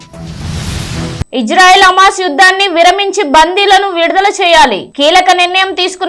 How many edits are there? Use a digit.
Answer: 1